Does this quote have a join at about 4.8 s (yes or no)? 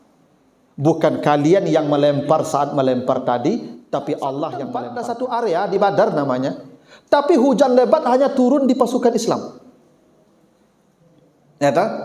yes